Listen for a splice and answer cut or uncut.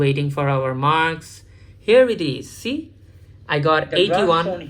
uncut